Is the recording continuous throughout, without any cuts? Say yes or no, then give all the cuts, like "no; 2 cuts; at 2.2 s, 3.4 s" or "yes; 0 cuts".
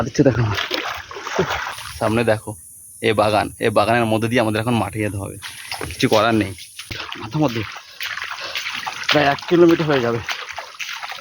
no; 2 cuts; at 1.6 s, 7.1 s